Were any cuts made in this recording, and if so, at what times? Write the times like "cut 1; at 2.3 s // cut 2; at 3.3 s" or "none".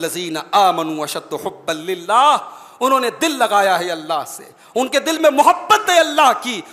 none